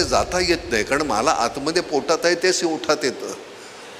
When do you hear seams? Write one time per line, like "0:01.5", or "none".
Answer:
none